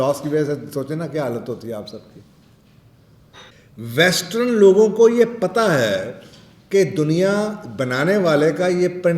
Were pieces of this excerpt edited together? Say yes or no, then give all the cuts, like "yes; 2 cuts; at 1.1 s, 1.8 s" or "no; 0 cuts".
yes; 1 cut; at 3.5 s